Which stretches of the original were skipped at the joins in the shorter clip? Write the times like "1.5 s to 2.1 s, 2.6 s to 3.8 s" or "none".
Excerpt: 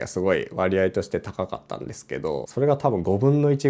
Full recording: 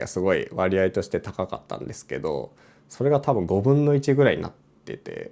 2.5 s to 2.9 s